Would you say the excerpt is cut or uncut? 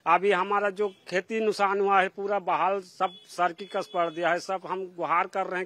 uncut